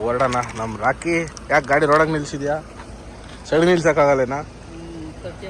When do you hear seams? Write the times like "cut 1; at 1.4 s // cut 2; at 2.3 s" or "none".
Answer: none